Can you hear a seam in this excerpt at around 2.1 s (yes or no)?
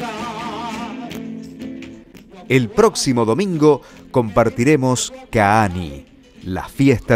yes